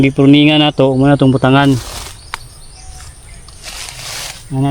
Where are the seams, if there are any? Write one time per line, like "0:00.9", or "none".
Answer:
none